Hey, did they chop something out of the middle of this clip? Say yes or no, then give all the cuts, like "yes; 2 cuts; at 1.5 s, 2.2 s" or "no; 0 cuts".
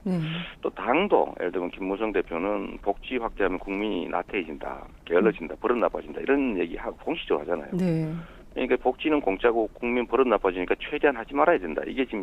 yes; 1 cut; at 9.5 s